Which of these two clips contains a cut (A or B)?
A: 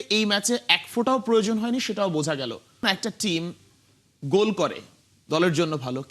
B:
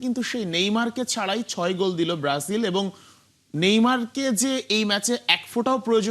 A